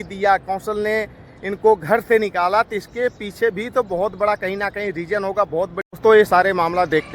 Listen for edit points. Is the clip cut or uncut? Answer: cut